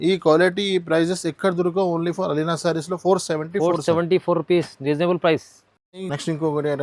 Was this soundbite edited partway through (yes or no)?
no